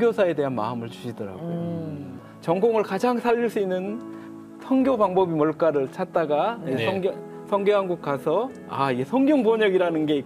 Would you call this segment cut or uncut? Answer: cut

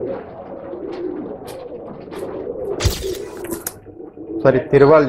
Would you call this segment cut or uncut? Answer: cut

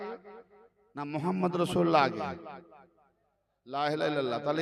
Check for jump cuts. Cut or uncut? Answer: uncut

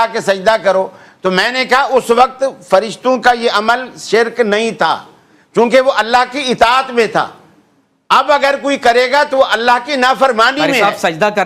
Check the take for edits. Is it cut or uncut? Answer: uncut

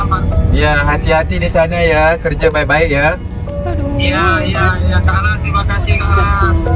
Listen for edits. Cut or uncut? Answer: uncut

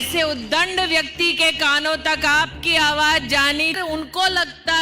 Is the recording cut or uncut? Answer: cut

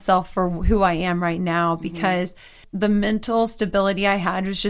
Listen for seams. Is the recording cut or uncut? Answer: cut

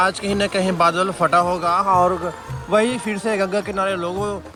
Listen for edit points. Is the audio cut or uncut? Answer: uncut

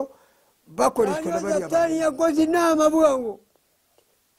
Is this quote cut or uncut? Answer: cut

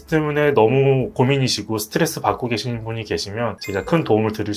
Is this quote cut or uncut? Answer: cut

